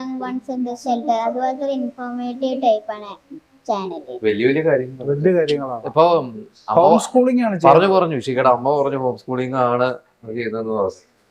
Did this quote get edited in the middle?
no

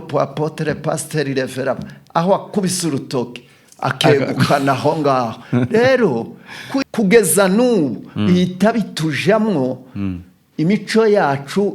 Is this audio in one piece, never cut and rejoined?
no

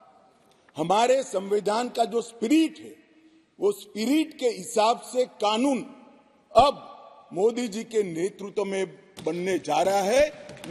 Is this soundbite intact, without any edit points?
yes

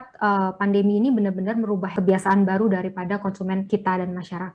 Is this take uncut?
no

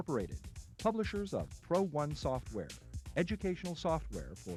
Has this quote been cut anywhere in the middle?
no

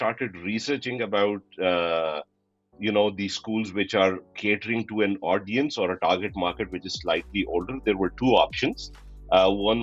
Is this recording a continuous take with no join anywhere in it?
yes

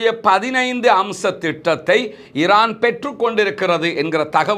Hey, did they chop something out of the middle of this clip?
no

